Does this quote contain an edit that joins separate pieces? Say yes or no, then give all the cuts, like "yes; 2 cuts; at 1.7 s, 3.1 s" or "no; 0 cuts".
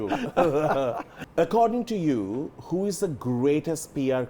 yes; 1 cut; at 1.1 s